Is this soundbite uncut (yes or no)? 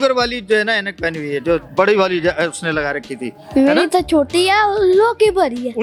yes